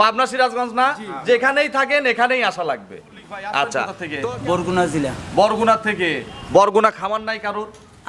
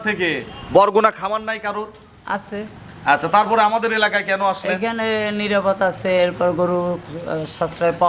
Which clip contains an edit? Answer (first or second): first